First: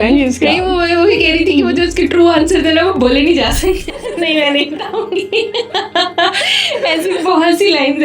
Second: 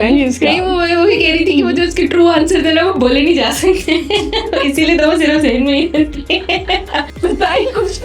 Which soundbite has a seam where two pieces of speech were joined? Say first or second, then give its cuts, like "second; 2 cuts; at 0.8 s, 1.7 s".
first; 1 cut; at 3.8 s